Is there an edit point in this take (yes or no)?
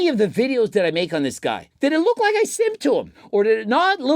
yes